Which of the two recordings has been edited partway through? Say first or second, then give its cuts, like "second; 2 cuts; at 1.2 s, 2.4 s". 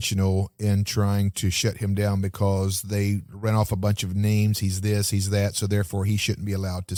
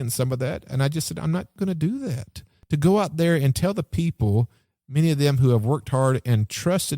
second; 2 cuts; at 1.5 s, 2.5 s